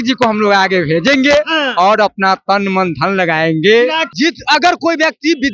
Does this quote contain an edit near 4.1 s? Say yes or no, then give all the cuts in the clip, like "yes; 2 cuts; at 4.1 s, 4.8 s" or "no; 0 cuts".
yes; 1 cut; at 4.1 s